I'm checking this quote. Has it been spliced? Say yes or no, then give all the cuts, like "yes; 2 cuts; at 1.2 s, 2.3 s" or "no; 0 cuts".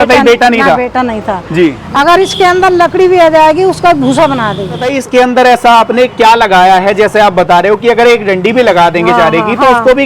yes; 2 cuts; at 1.8 s, 4.9 s